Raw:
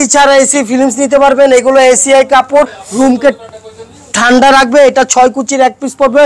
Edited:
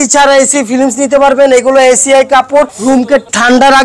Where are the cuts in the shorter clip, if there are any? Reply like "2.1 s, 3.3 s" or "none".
2.8 s